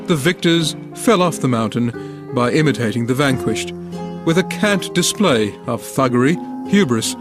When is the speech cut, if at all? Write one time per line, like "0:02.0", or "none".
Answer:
none